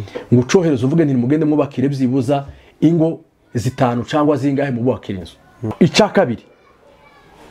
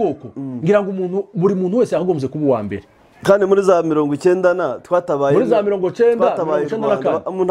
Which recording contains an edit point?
first; 1 cut; at 5.7 s

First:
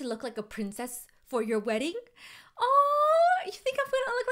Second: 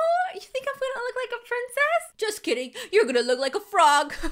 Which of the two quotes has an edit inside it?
second; 1 cut; at 2.1 s

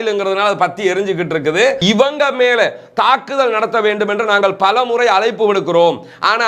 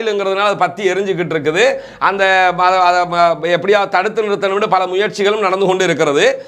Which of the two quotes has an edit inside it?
first; 1 cut; at 1.8 s

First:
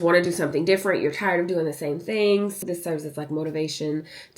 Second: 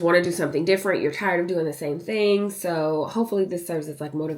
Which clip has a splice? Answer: first; 1 cut; at 2.6 s

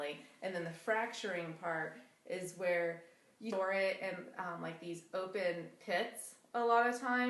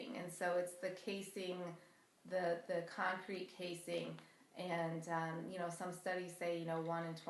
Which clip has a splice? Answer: first; 1 cut; at 3.5 s

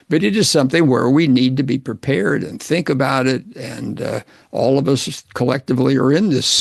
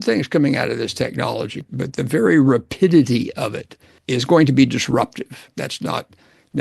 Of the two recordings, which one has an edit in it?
second; 3 cuts; at 1.6 s, 3.9 s, 5.5 s

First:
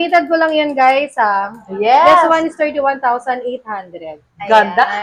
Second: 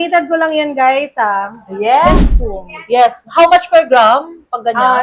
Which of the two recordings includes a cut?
second; 1 cut; at 2.1 s

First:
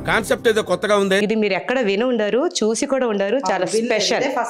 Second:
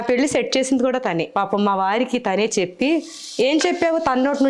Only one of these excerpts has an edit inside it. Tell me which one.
second; 1 cut; at 1.3 s

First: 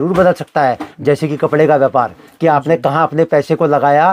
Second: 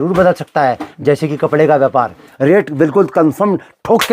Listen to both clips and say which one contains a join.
second; 1 cut; at 2.3 s

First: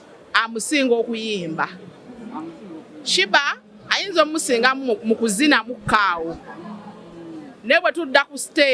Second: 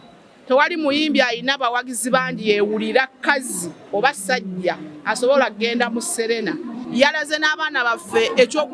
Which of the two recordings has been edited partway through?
second; 1 cut; at 6.8 s

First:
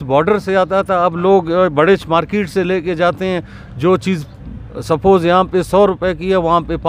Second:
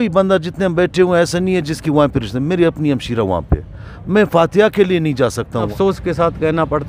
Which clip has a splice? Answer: second; 1 cut; at 5.7 s

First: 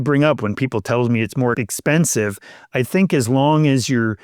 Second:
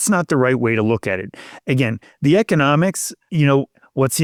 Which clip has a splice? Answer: first; 2 cuts; at 1.6 s, 2.7 s

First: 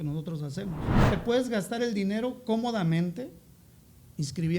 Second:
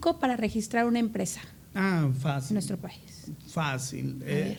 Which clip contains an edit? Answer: first; 1 cut; at 1.0 s

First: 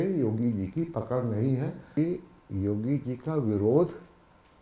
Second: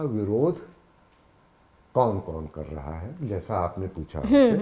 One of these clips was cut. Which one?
first; 1 cut; at 2.0 s

